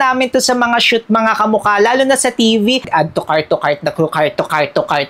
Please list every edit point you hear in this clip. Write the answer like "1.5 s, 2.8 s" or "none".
2.9 s

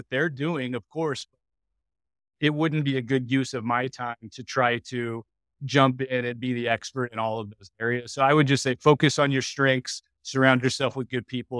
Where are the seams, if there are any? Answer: none

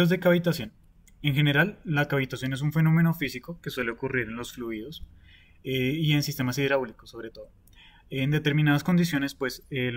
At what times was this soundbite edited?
7.1 s

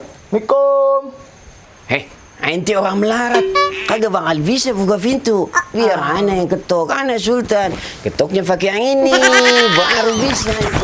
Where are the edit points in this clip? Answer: none

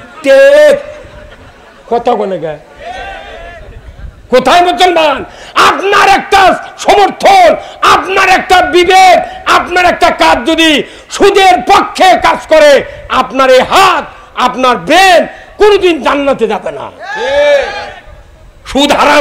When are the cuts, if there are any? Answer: none

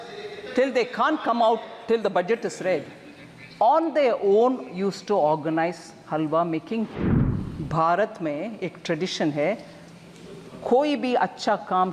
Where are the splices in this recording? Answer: 7.0 s

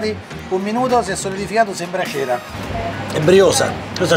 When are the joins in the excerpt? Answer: 2.5 s

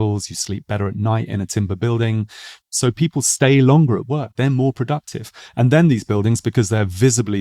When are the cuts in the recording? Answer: 2.7 s

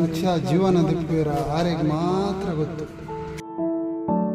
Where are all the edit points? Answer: 3.1 s

